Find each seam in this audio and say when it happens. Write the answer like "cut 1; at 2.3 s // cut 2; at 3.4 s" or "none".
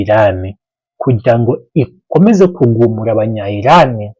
none

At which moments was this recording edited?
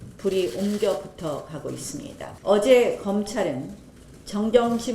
cut 1; at 2.2 s

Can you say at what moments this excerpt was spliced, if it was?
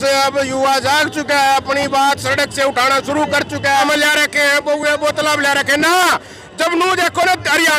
cut 1; at 3.8 s

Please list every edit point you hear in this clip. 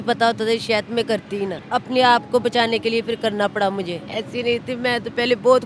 cut 1; at 1.6 s // cut 2; at 4.0 s

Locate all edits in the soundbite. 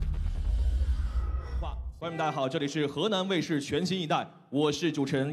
cut 1; at 1.4 s

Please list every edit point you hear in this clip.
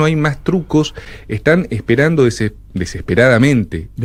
none

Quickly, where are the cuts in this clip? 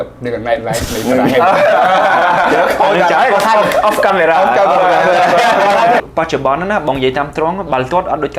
cut 1; at 6.0 s

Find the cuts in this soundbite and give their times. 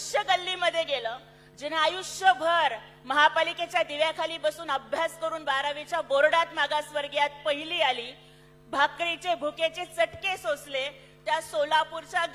none

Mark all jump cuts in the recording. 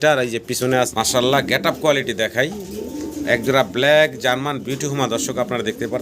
cut 1; at 0.9 s

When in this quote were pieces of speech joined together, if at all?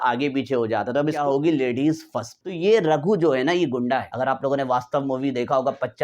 cut 1; at 1.2 s // cut 2; at 2.4 s // cut 3; at 4.1 s

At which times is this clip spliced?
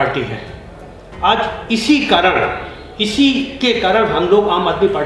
none

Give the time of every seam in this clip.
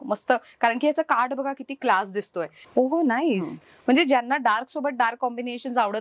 cut 1; at 2.6 s

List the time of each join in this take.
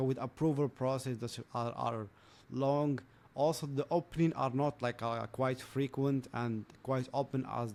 none

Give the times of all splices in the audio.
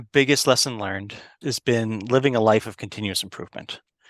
cut 1; at 1.4 s

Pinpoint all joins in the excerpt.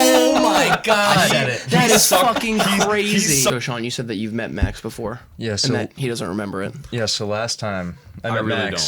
cut 1; at 3.5 s

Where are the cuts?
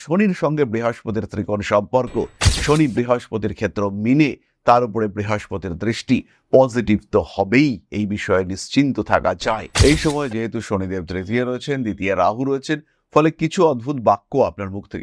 cut 1; at 9.7 s

